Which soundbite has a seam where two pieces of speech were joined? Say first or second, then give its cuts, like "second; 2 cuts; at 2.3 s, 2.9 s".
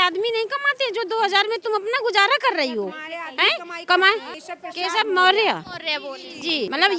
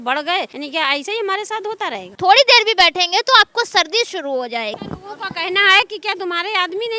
second; 2 cuts; at 2.2 s, 4.7 s